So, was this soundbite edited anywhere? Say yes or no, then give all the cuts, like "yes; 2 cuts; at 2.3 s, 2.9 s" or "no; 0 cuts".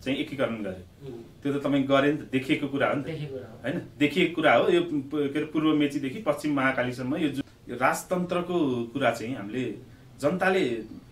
yes; 1 cut; at 7.4 s